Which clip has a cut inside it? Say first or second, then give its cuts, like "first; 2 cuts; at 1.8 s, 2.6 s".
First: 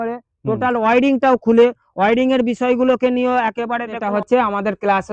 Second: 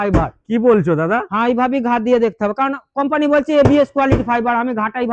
first; 1 cut; at 4.0 s